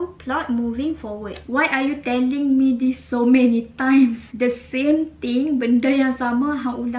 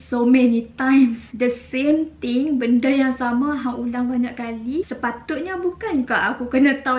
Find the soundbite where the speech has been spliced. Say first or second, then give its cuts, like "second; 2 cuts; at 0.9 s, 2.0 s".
second; 1 cut; at 4.9 s